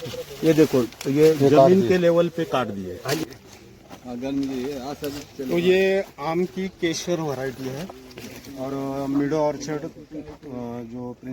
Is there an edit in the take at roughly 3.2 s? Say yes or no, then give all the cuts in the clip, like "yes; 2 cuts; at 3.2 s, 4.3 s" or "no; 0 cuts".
yes; 1 cut; at 3.2 s